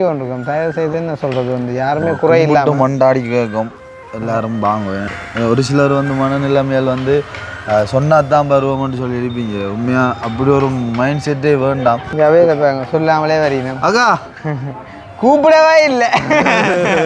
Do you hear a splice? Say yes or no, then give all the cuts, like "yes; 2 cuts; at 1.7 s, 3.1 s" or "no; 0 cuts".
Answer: yes; 2 cuts; at 5.1 s, 12.1 s